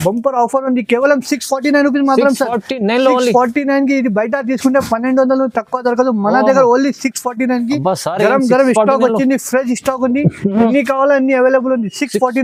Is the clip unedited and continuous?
yes; 0 cuts

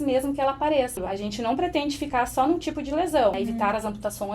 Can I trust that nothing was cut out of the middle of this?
no; 2 cuts; at 1.0 s, 3.4 s

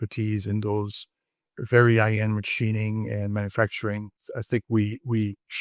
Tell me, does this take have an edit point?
yes; 1 cut; at 4.3 s

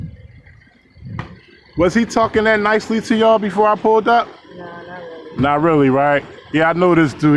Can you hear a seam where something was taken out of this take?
no; 0 cuts

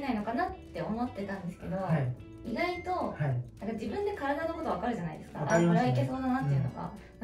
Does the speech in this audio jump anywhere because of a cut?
no; 0 cuts

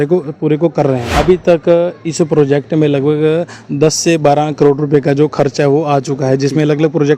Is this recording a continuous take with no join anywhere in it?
no; 1 cut; at 1.1 s

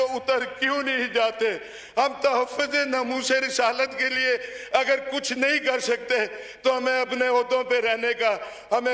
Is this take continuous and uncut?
yes; 0 cuts

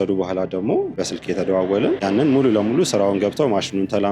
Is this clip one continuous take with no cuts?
no; 2 cuts; at 1.0 s, 2.0 s

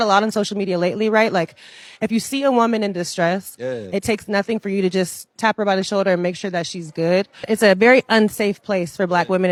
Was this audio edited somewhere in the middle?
no; 0 cuts

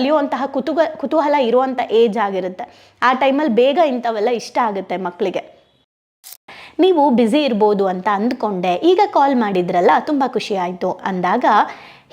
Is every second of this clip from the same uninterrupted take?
no; 1 cut; at 6.3 s

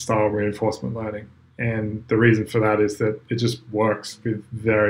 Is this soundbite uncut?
yes; 0 cuts

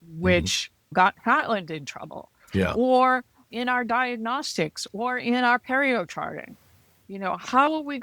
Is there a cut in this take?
yes; 1 cut; at 0.9 s

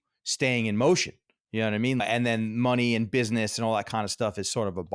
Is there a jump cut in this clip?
yes; 1 cut; at 2.0 s

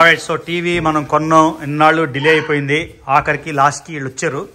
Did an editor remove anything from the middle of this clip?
no; 0 cuts

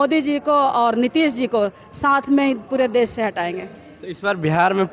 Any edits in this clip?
no; 0 cuts

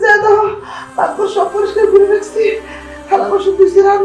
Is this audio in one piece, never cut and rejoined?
yes; 0 cuts

